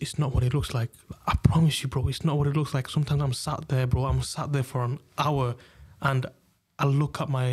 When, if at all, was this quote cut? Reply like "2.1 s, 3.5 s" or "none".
none